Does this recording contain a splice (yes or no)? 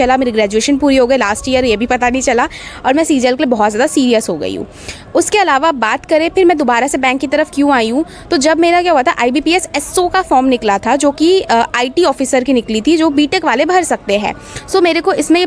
no